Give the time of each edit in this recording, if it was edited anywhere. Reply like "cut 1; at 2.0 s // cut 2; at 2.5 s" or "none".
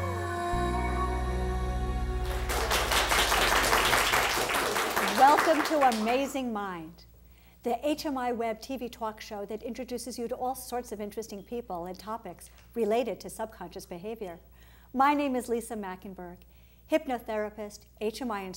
cut 1; at 4.5 s